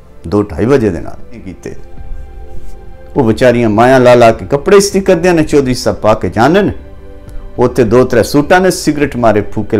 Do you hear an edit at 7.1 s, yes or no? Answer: no